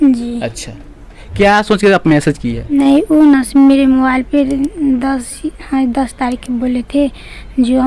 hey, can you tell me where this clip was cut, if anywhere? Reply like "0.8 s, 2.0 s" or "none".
2.8 s